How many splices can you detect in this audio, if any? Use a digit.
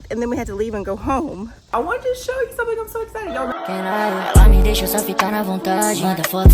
2